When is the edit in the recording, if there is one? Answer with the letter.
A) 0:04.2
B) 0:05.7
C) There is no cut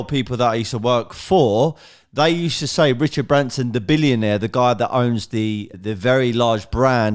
B